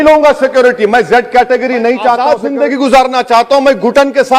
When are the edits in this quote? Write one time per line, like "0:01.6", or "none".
0:02.2